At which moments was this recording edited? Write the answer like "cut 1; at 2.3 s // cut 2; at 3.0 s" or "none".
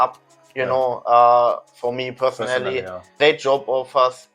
cut 1; at 3.1 s